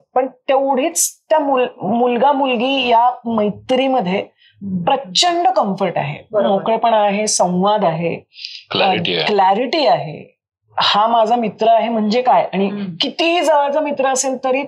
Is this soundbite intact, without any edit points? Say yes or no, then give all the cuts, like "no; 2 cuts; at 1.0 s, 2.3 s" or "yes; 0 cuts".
yes; 0 cuts